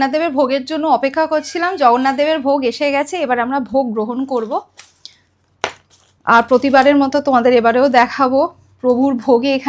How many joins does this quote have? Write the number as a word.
zero